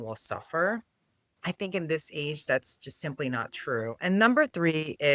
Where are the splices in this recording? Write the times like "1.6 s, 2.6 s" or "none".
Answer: none